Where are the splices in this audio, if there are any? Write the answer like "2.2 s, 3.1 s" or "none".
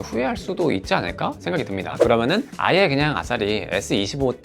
1.9 s